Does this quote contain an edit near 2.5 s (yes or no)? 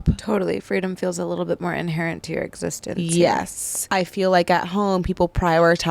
no